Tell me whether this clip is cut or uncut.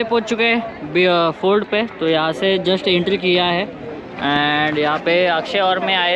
uncut